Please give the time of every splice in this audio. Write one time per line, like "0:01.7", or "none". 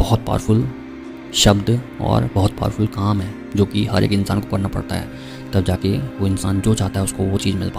none